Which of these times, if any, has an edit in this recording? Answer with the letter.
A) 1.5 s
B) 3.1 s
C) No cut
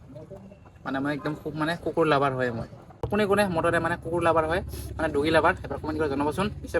B